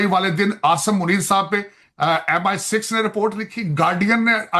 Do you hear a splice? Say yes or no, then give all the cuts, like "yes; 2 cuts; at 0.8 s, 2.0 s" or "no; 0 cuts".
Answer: no; 0 cuts